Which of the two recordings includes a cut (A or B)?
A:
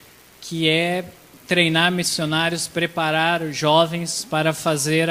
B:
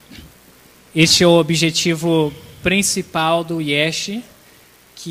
B